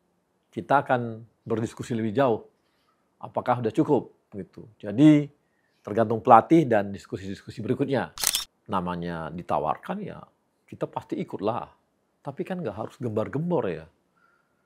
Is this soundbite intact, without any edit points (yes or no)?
no